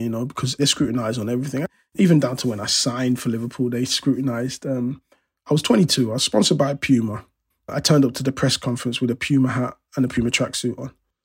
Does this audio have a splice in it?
yes; 1 cut; at 1.7 s

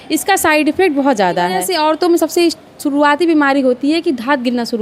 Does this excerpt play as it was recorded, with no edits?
no; 1 cut; at 1.6 s

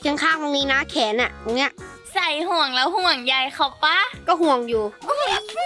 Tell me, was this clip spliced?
no; 0 cuts

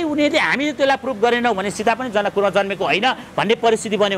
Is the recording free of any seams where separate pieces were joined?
yes; 0 cuts

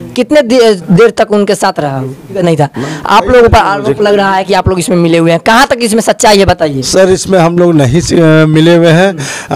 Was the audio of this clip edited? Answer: yes; 1 cut; at 2.4 s

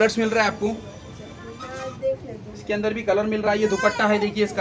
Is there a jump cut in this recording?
no; 0 cuts

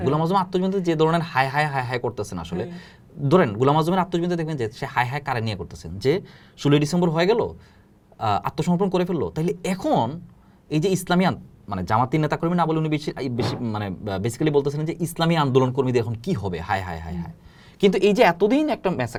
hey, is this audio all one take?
yes; 0 cuts

